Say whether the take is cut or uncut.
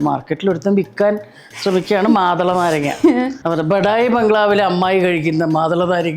cut